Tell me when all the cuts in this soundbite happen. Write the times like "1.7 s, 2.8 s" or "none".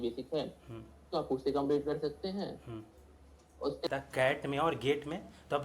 3.9 s